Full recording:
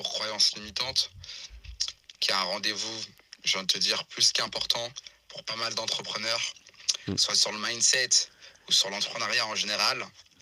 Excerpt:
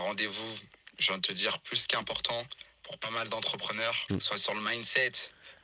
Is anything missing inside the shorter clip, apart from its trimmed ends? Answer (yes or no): yes